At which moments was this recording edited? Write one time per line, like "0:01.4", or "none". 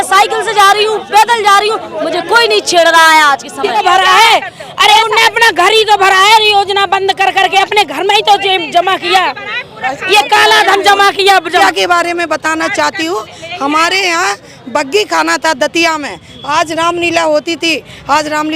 0:03.7
0:11.6